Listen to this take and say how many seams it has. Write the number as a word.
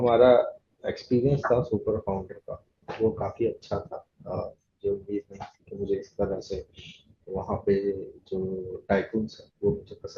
zero